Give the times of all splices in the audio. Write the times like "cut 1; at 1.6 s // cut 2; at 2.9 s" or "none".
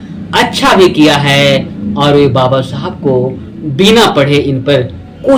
none